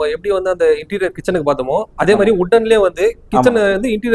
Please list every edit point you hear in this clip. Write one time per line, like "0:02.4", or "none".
none